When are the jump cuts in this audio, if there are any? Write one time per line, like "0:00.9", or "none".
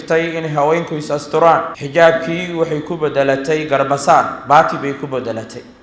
0:01.8